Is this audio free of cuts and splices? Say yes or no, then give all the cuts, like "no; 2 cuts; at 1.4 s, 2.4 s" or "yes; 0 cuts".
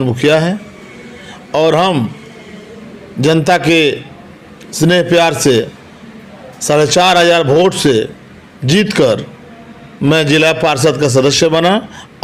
yes; 0 cuts